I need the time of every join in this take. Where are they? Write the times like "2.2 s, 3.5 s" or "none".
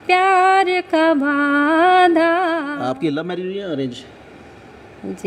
2.8 s